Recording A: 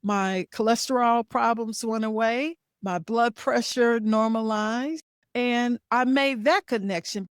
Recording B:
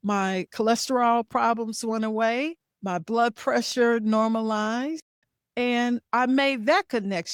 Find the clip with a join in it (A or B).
A